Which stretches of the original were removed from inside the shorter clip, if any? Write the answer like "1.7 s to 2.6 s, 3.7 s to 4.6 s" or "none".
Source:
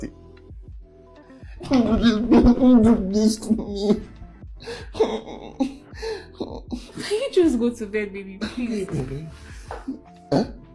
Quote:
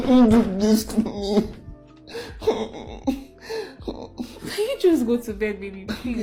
none